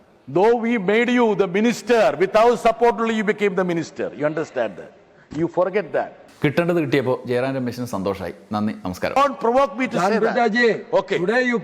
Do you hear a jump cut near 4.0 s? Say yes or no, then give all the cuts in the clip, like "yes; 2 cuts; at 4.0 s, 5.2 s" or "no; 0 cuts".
no; 2 cuts; at 6.3 s, 9.1 s